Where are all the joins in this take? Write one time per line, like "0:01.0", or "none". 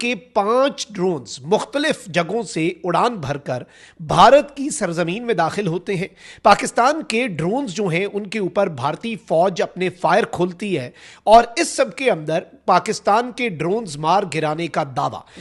none